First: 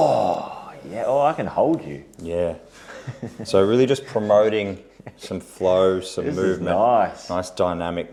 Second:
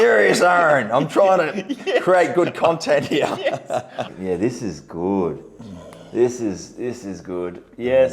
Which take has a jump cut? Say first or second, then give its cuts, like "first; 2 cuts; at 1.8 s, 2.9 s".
second; 1 cut; at 4.1 s